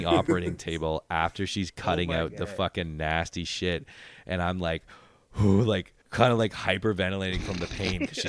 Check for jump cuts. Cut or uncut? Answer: cut